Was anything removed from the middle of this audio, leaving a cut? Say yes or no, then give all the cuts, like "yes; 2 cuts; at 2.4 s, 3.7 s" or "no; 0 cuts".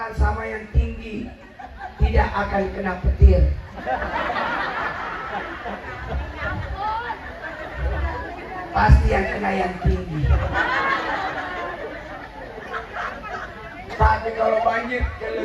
no; 0 cuts